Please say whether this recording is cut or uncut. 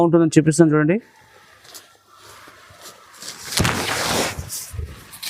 uncut